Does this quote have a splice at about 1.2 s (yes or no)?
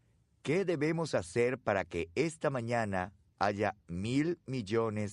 no